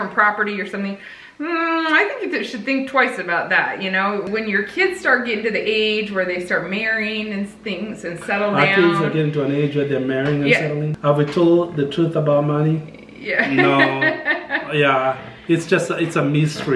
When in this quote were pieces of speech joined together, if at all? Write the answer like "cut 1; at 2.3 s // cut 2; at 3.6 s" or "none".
cut 1; at 4.2 s // cut 2; at 10.9 s